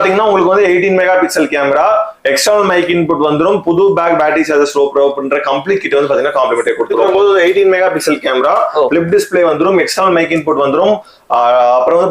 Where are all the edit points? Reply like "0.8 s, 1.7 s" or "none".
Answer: 7.0 s